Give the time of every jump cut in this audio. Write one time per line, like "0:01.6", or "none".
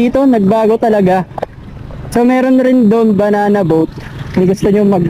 none